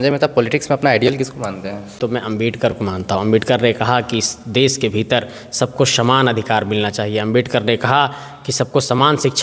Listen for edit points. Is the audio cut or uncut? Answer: cut